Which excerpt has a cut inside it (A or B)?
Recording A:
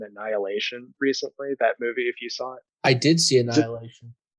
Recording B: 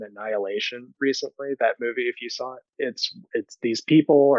B